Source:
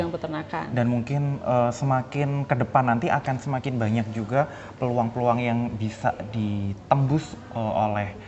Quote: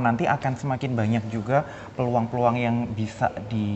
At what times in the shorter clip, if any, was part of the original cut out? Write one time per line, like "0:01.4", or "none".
none